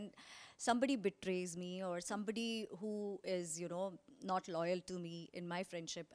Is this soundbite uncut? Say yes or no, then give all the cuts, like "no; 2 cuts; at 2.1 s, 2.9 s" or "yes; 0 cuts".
yes; 0 cuts